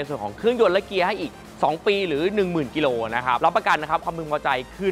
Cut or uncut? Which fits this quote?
cut